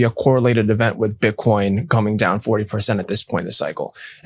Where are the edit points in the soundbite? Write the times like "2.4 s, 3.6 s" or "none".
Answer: none